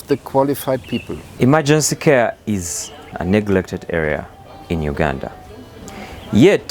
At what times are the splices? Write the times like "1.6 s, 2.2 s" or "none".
1.3 s, 3.1 s